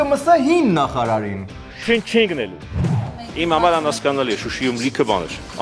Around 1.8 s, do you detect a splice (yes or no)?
yes